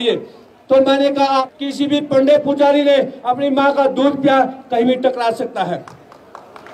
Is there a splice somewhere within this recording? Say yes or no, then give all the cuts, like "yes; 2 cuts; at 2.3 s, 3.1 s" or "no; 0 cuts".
yes; 1 cut; at 1.4 s